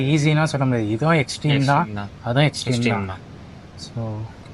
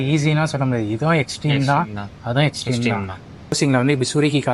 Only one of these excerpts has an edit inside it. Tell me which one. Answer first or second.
second